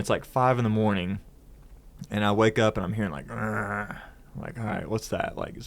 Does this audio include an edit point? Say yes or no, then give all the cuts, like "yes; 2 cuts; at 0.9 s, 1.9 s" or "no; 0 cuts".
no; 0 cuts